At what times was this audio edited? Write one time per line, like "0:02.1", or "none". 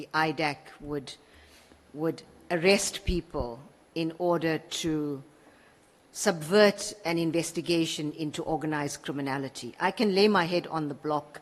none